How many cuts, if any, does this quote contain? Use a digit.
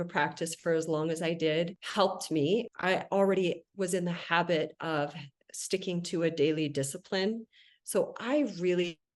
2